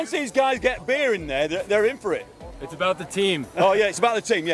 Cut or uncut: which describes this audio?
uncut